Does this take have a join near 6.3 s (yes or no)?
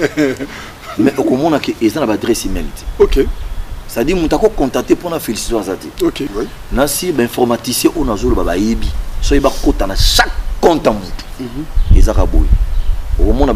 yes